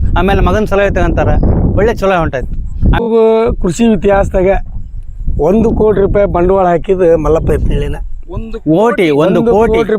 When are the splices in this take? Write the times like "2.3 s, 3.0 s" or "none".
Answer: 3.0 s